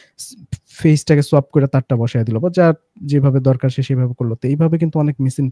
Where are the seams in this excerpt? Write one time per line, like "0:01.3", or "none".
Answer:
none